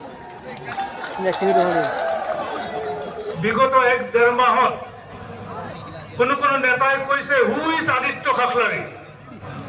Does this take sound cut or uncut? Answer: cut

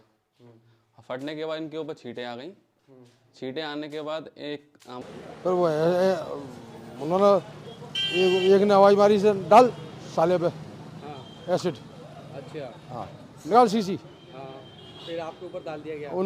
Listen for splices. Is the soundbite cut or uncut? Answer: cut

